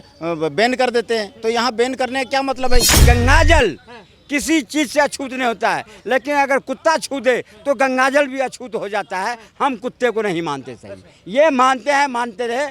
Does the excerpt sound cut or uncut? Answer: cut